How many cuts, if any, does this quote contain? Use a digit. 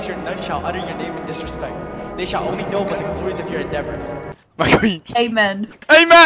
2